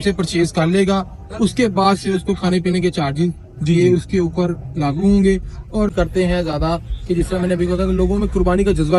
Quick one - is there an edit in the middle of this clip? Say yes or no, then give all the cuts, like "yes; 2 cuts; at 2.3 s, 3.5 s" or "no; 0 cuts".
yes; 1 cut; at 5.9 s